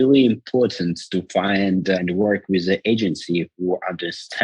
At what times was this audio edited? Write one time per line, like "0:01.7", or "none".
0:02.0